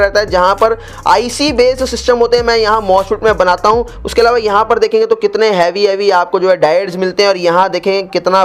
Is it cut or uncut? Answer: uncut